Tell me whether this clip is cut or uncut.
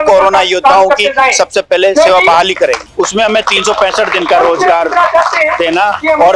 cut